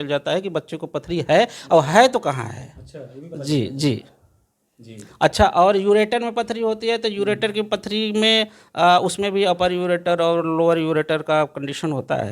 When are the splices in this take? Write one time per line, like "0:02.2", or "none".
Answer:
none